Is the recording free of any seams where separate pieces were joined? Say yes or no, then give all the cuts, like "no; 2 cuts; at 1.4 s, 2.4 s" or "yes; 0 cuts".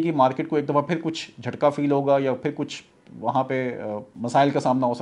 no; 1 cut; at 4.1 s